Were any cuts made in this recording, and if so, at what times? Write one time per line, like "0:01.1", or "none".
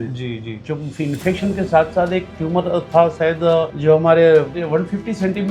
0:03.7
0:04.6